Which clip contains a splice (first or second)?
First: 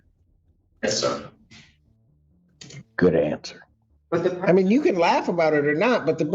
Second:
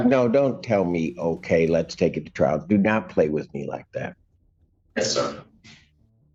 first